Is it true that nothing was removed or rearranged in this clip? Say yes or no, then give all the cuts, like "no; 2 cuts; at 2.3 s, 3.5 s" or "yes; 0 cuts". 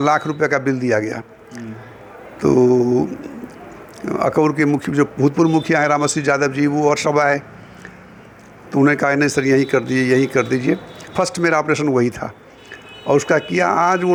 yes; 0 cuts